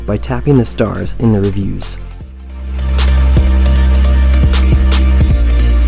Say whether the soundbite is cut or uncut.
cut